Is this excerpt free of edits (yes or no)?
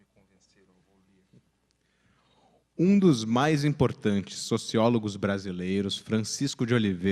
no